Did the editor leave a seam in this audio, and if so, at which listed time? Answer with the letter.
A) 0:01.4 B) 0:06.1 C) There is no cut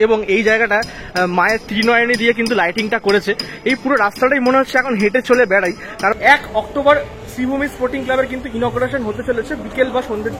B